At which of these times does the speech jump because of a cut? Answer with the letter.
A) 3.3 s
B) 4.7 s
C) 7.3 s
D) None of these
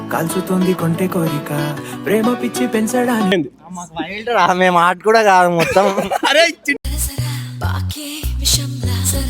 A